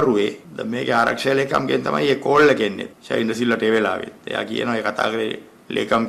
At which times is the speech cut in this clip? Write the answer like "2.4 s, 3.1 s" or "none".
none